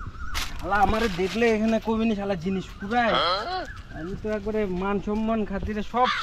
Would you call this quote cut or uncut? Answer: uncut